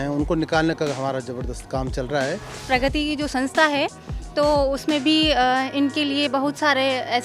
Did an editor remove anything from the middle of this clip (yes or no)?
yes